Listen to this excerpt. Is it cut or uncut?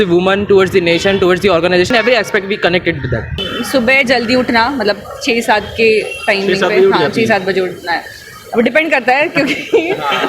cut